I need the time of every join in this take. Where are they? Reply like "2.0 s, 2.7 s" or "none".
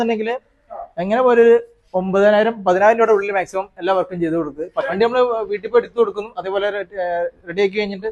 4.9 s